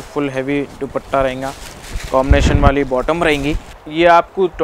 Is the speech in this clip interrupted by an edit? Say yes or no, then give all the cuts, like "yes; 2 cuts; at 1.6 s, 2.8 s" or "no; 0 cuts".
no; 0 cuts